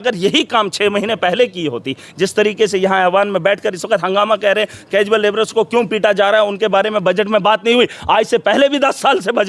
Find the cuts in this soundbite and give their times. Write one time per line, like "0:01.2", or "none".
none